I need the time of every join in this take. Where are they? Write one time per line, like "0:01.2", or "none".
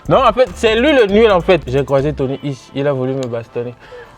0:01.7